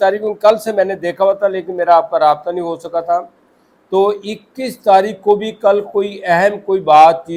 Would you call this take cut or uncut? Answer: uncut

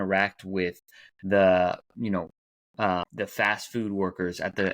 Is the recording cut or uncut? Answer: cut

